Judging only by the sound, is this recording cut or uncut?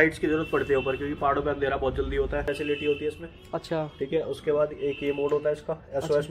cut